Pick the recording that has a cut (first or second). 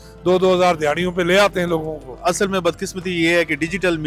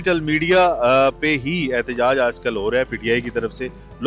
first